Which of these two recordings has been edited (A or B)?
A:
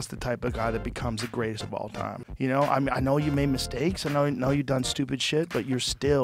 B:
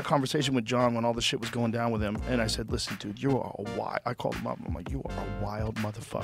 A